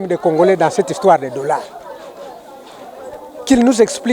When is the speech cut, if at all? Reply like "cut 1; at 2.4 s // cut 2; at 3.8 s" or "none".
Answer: none

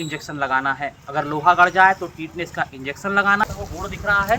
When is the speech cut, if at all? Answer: cut 1; at 3.4 s

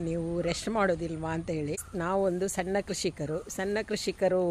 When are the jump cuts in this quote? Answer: cut 1; at 1.8 s

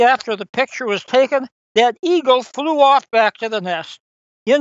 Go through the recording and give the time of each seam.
none

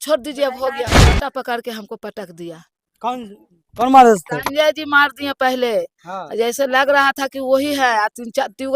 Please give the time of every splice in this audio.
cut 1; at 1.2 s

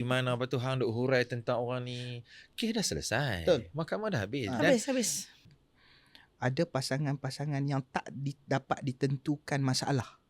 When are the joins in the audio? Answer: cut 1; at 5.4 s

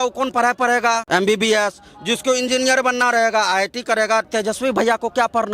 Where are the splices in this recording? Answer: cut 1; at 1.0 s // cut 2; at 4.3 s

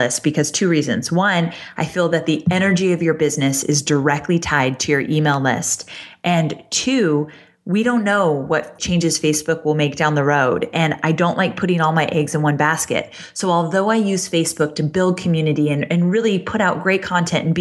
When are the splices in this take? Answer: cut 1; at 8.7 s

